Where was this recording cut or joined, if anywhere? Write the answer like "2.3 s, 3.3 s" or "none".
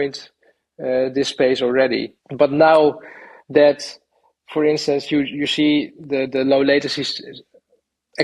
2.2 s